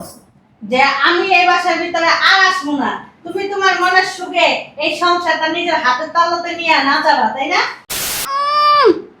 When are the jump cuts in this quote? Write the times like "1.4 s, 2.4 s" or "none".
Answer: 8.0 s

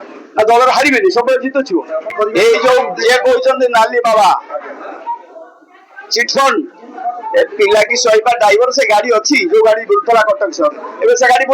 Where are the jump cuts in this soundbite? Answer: 2.1 s, 4.7 s

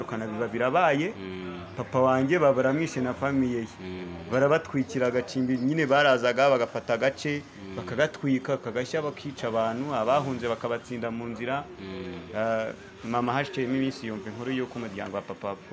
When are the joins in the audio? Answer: none

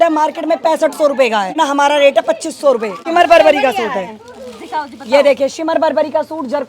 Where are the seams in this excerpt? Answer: 1.5 s, 3.0 s

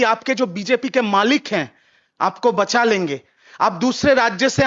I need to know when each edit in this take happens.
none

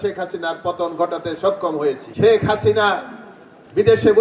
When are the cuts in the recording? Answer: 2.1 s

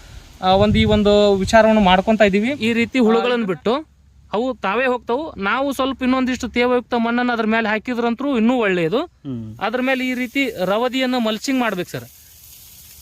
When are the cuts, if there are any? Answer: 2.6 s

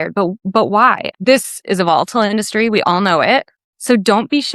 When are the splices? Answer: 1.1 s

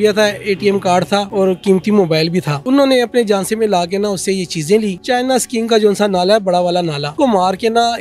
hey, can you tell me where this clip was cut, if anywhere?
1.3 s, 2.6 s, 5.0 s, 7.1 s

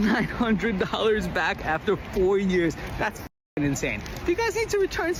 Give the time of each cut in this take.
none

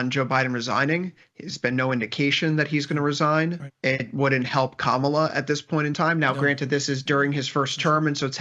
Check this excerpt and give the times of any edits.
none

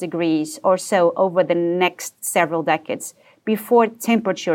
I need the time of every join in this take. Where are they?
none

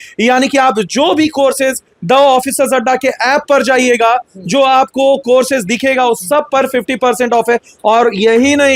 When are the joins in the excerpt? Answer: none

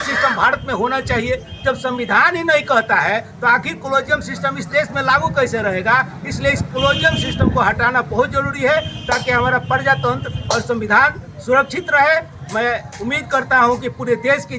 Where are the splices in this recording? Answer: none

